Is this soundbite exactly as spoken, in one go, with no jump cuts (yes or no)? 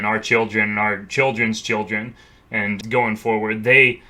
no